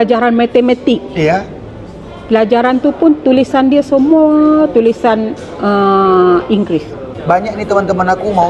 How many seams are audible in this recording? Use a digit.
1